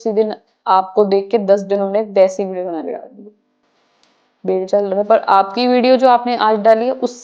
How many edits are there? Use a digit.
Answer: 0